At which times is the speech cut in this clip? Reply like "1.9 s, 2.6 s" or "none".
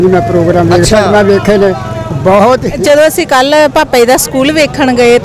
2.7 s